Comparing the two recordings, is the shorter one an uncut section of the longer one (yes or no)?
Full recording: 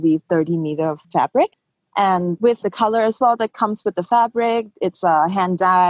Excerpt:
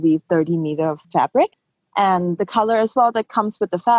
no